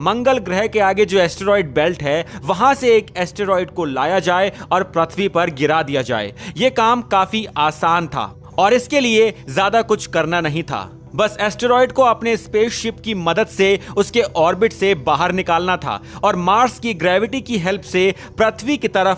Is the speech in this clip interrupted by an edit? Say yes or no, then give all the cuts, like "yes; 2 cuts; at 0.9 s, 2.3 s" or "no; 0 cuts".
no; 0 cuts